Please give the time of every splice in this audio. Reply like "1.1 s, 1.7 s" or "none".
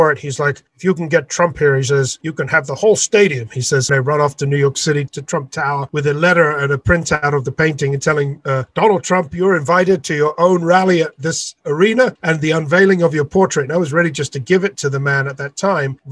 3.9 s, 5.1 s, 8.7 s, 12.2 s

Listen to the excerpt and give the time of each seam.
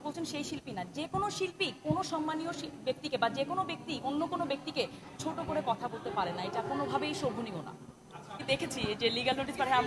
8.4 s

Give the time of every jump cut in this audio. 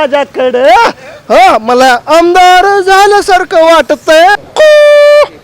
4.4 s

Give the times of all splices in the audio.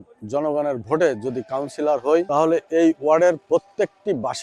2.3 s

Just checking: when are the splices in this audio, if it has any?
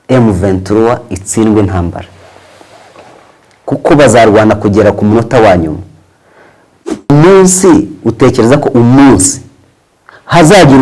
6.9 s

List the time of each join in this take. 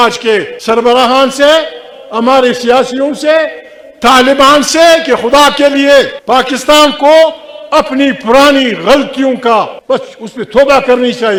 none

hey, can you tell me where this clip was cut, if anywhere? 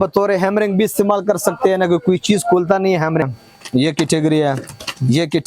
3.3 s

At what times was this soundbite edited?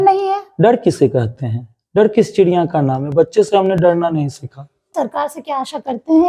4.9 s

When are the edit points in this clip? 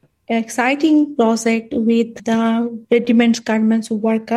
2.1 s

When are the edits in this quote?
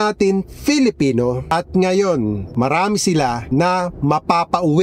1.5 s, 2.5 s, 3.4 s

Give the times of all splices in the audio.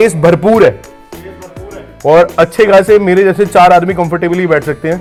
none

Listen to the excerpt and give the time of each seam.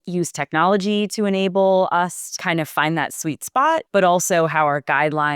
2.2 s, 3.9 s

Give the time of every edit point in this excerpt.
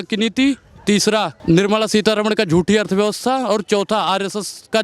1.3 s

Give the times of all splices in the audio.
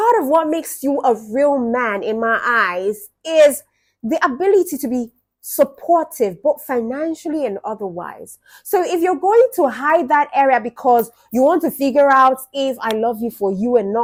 none

